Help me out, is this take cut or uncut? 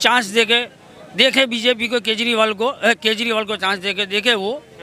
uncut